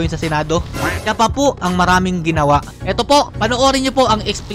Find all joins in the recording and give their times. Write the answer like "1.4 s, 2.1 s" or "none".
2.7 s